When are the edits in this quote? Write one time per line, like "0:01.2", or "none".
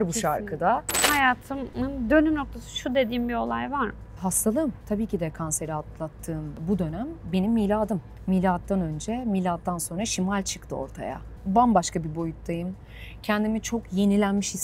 0:01.2
0:04.1
0:04.8
0:06.6
0:08.1
0:11.3